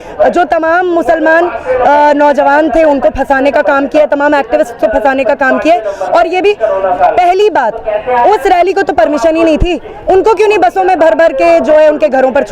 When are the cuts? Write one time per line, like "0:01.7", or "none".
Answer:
none